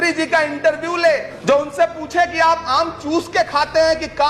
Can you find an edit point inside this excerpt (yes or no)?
yes